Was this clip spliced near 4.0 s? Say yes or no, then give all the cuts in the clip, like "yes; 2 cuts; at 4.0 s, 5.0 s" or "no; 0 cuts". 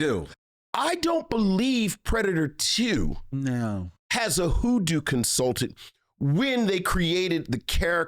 yes; 1 cut; at 4.0 s